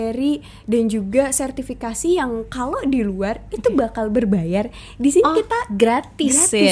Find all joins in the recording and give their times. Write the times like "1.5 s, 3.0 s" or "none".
none